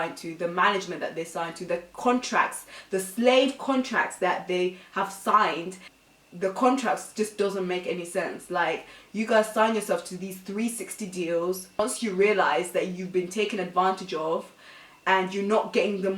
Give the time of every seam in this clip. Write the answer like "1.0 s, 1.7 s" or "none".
6.0 s, 11.8 s